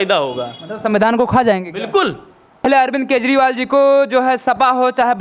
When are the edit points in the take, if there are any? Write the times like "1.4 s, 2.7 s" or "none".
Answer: 2.6 s